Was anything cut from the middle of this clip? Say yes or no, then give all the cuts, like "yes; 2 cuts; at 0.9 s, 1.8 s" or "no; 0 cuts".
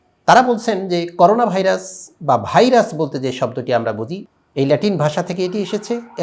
yes; 1 cut; at 4.2 s